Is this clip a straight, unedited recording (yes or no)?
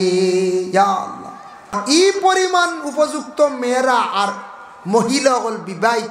no